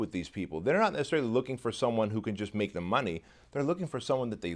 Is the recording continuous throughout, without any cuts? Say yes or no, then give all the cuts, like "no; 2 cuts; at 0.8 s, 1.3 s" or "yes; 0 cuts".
yes; 0 cuts